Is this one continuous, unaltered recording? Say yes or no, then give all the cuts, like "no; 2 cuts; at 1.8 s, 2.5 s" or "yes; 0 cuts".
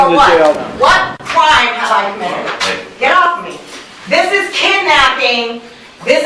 yes; 0 cuts